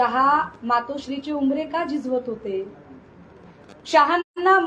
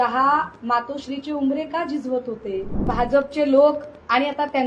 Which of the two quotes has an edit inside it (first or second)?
second